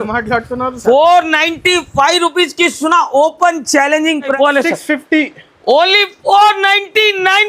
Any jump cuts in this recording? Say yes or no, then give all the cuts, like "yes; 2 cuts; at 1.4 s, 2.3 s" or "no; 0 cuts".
yes; 1 cut; at 4.4 s